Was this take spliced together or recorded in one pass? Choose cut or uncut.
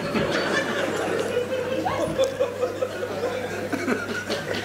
uncut